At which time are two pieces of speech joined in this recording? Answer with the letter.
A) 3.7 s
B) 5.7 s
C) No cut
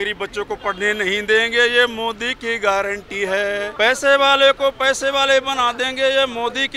A